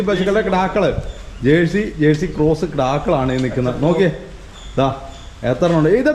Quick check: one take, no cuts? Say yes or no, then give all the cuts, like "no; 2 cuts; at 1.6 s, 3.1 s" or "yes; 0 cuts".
yes; 0 cuts